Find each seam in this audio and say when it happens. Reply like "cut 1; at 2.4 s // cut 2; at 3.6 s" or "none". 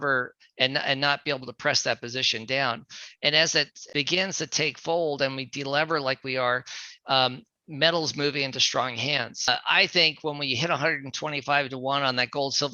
cut 1; at 3.8 s // cut 2; at 9.5 s